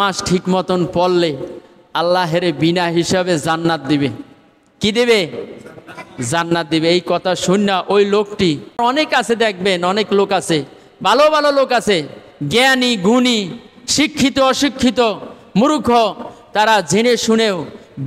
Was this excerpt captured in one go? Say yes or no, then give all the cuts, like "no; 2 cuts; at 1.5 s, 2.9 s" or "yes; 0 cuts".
no; 1 cut; at 8.8 s